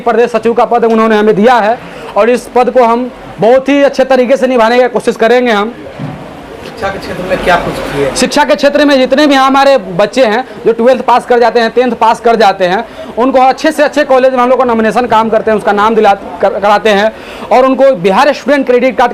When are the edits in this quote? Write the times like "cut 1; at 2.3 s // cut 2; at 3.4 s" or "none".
none